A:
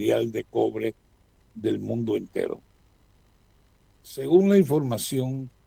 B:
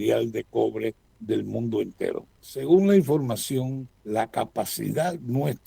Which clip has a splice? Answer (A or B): B